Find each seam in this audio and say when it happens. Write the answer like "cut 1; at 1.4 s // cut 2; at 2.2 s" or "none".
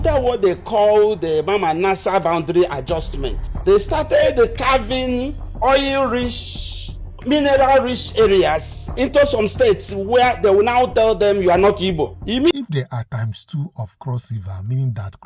cut 1; at 12.5 s